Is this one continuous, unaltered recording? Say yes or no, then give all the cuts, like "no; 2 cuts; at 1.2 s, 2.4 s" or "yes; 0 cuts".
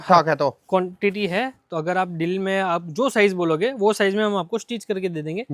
yes; 0 cuts